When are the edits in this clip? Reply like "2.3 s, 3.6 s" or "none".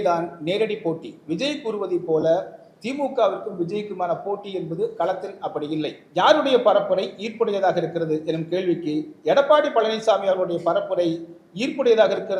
6.0 s